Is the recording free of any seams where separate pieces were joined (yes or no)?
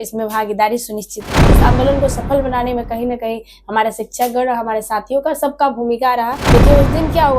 no